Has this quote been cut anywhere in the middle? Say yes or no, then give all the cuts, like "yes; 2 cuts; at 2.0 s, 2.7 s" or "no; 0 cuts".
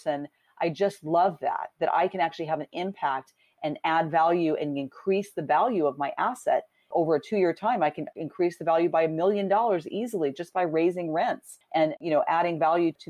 yes; 1 cut; at 12.0 s